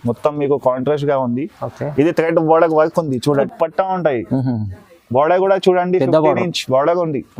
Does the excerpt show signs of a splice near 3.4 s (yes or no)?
yes